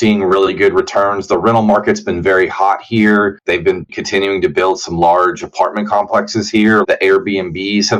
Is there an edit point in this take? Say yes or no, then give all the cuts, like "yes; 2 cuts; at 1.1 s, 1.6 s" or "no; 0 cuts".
yes; 2 cuts; at 3.7 s, 6.8 s